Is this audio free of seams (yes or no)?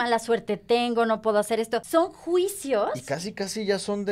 no